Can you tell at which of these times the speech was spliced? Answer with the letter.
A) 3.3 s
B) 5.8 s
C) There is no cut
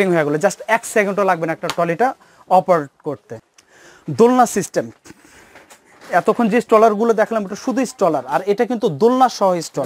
A